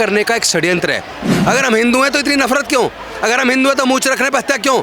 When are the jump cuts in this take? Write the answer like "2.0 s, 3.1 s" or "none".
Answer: 1.3 s